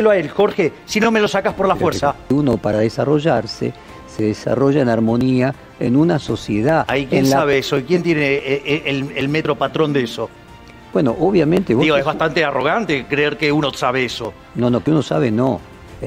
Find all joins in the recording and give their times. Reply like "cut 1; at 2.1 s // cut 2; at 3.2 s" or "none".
cut 1; at 2.2 s